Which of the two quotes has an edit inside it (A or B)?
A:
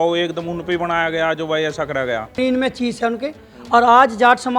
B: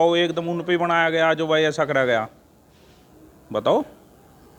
A